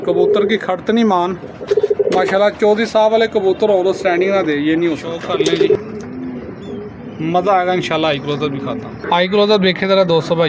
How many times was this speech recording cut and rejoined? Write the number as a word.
two